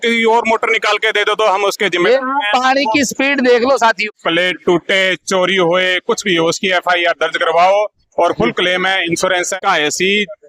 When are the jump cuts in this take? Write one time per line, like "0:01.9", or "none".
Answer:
0:04.0
0:09.6